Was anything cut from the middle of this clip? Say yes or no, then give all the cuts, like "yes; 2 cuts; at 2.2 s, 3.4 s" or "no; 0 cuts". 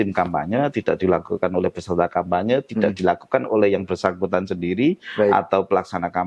no; 0 cuts